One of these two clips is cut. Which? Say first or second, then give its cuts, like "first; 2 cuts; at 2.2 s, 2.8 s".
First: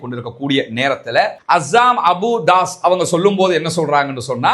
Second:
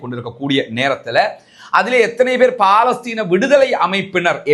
first; 1 cut; at 1.4 s